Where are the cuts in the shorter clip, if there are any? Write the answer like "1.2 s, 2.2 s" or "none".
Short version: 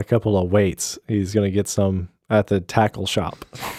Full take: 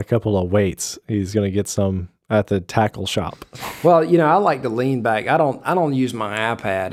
none